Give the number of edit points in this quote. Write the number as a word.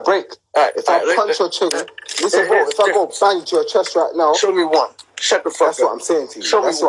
zero